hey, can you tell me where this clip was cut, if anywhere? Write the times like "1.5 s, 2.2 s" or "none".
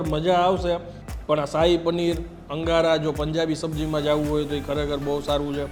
none

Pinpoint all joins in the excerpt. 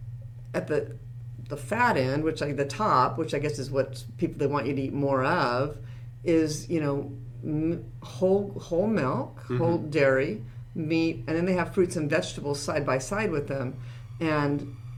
none

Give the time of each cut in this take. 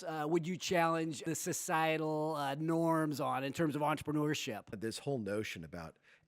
1.2 s, 4.7 s

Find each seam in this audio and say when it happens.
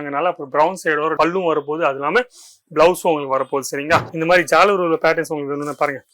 4.1 s

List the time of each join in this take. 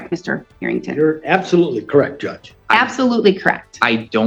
none

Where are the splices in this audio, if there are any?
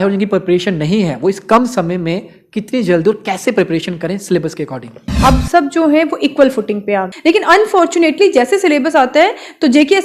5.1 s, 7.1 s

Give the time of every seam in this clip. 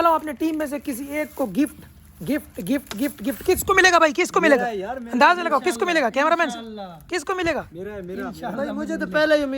8.6 s

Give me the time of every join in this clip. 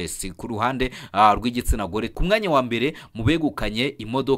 2.1 s

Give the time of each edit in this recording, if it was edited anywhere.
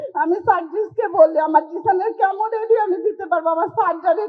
none

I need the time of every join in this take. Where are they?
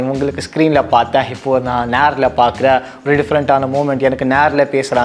none

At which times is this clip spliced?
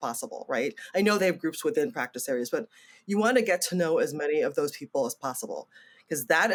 none

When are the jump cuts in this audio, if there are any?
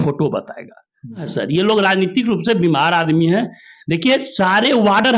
1.3 s

